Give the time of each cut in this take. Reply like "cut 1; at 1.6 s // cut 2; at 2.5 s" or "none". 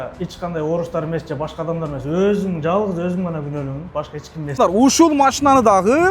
cut 1; at 4.6 s